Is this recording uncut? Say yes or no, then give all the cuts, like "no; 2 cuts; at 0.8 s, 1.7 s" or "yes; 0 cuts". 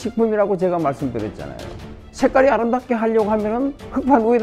no; 1 cut; at 2.0 s